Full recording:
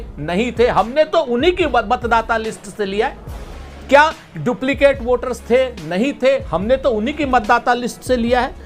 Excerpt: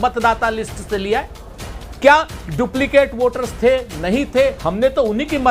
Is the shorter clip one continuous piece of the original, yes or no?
yes